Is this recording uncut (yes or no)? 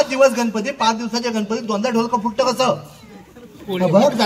yes